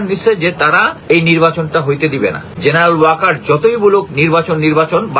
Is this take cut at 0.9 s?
yes; 2 cuts; at 0.9 s, 2.5 s

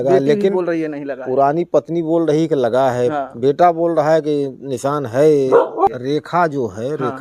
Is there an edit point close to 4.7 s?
no; 1 cut; at 5.9 s

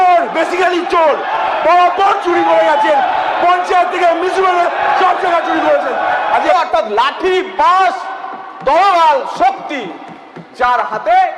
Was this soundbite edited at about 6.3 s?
yes; 1 cut; at 6.3 s

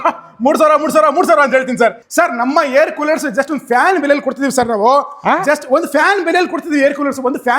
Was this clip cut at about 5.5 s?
no; 1 cut; at 2.0 s

